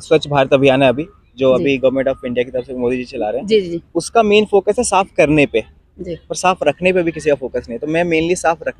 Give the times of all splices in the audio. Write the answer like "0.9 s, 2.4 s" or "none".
none